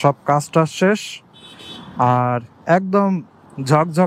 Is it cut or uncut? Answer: uncut